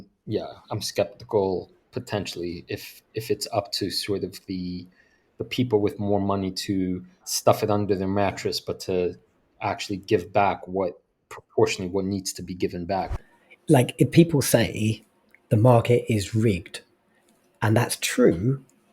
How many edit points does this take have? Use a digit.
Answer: 2